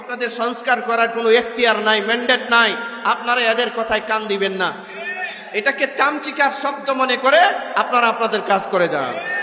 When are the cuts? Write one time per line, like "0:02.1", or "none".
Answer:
none